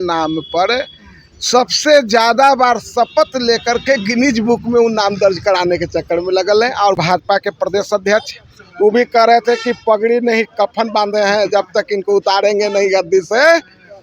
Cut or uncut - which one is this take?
cut